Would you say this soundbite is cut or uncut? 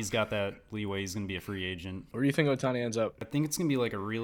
cut